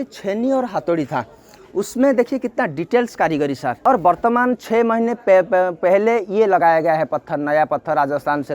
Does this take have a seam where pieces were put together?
yes; 1 cut; at 3.8 s

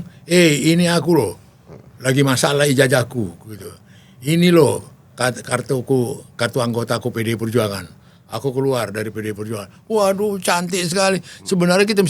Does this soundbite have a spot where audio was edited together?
no; 0 cuts

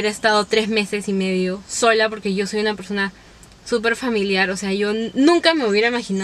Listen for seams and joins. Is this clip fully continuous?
yes; 0 cuts

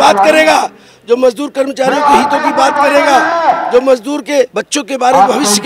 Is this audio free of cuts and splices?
no; 1 cut; at 4.6 s

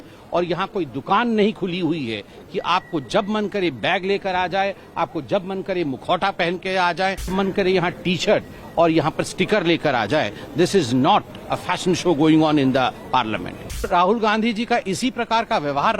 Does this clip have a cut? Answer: yes; 2 cuts; at 7.3 s, 13.9 s

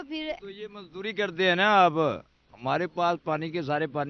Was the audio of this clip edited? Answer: no; 0 cuts

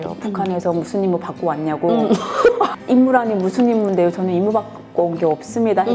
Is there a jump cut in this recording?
yes; 1 cut; at 2.8 s

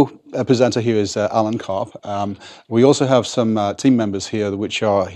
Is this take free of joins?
yes; 0 cuts

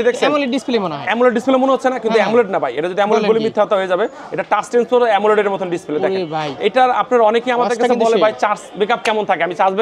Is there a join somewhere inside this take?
no; 0 cuts

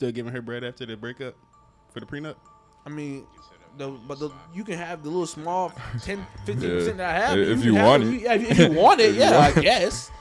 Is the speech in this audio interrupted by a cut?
no; 0 cuts

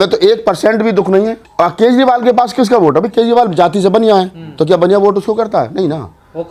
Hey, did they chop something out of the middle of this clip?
yes; 1 cut; at 1.4 s

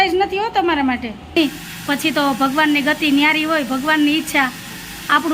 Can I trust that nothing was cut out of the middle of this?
no; 1 cut; at 1.4 s

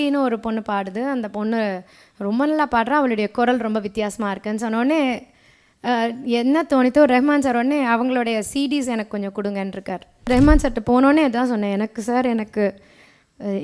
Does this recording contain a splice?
yes; 1 cut; at 10.3 s

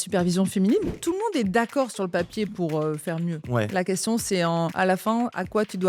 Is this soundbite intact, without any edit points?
no; 3 cuts; at 1.0 s, 3.4 s, 5.1 s

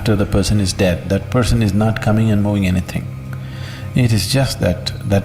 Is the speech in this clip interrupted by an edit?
no; 0 cuts

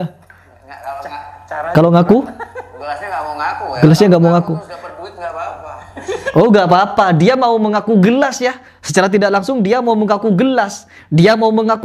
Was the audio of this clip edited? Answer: no; 0 cuts

